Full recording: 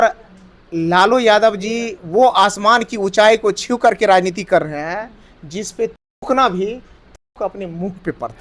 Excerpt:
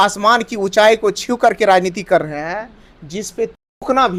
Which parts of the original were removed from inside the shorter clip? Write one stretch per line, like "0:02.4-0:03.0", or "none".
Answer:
none